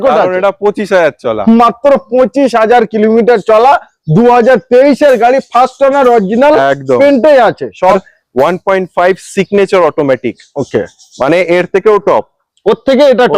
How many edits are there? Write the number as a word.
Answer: one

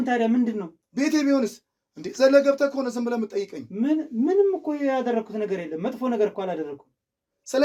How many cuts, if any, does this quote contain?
zero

